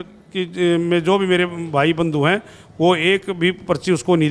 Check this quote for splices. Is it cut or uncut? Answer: uncut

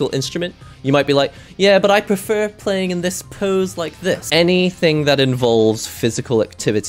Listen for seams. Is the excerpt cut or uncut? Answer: cut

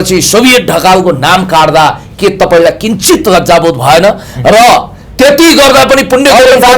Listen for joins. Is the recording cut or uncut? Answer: uncut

